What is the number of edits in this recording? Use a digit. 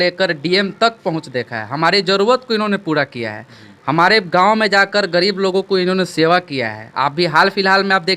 0